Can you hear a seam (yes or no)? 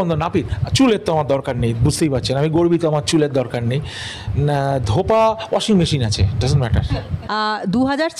no